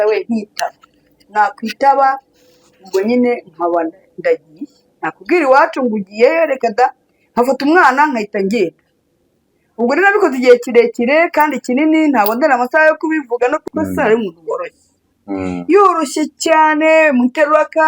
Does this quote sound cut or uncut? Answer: cut